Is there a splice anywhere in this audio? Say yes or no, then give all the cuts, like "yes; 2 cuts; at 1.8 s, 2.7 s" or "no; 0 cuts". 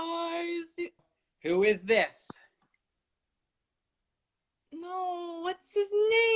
yes; 1 cut; at 1.0 s